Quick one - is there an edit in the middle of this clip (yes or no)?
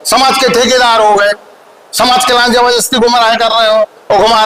no